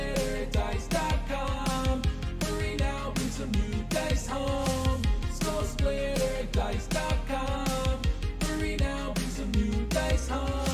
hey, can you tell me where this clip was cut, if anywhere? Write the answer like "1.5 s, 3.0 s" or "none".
none